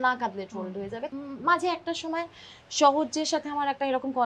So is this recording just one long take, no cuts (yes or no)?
no